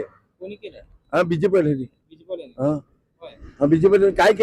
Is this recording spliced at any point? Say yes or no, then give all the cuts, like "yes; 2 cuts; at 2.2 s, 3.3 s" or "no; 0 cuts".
no; 0 cuts